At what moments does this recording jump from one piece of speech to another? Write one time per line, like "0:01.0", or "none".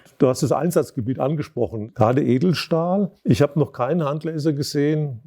0:01.8
0:03.2

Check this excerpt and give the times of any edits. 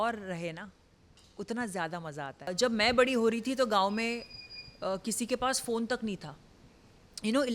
0:02.5

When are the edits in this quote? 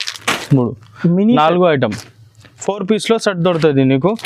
none

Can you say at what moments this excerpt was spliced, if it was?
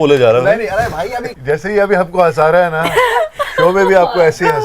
0:01.3

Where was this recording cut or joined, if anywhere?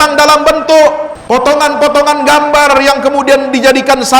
0:01.1

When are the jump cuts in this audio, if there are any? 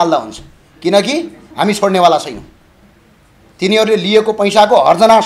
none

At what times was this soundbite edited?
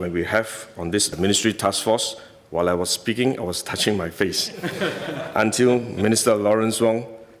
none

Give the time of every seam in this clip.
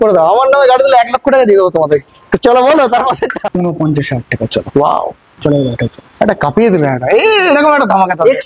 0:03.4

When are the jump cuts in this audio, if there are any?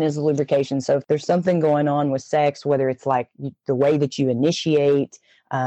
0:01.0

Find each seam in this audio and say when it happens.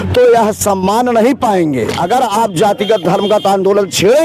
0:01.9

